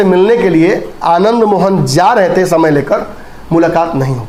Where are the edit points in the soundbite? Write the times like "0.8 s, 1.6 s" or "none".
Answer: none